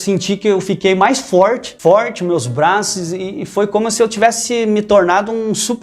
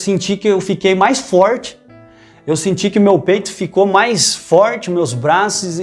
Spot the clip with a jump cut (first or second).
first